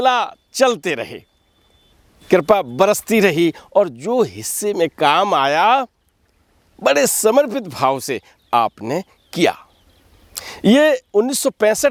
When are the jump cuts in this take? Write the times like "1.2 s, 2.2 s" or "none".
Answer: none